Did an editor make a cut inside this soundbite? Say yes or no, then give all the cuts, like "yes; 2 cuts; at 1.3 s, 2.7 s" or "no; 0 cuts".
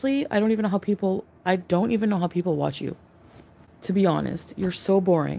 no; 0 cuts